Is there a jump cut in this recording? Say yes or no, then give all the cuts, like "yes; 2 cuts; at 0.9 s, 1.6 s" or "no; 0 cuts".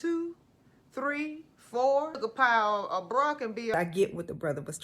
yes; 2 cuts; at 2.2 s, 3.7 s